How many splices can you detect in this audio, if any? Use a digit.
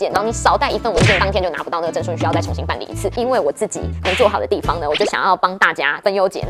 1